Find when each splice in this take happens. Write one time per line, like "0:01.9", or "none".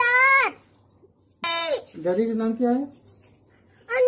0:01.4